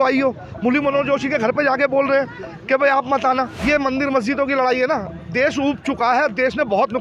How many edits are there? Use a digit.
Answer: 1